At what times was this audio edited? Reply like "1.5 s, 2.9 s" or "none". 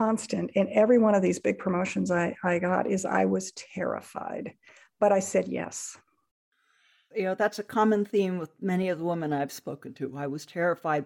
7.0 s